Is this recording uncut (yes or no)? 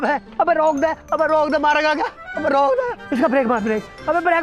yes